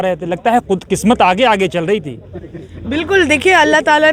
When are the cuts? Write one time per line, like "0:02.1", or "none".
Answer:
none